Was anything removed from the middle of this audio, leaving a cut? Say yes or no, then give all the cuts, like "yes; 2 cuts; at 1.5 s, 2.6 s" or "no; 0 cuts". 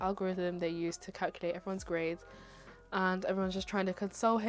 no; 0 cuts